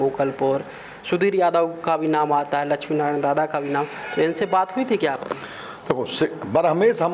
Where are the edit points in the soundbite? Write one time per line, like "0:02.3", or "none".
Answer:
none